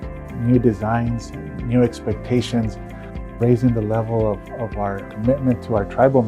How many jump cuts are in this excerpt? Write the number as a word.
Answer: one